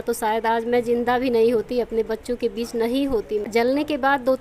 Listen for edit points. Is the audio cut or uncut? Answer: cut